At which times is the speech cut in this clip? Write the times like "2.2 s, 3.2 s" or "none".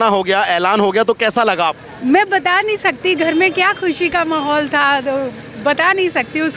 none